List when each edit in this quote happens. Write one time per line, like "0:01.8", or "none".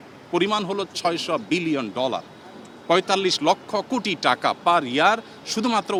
none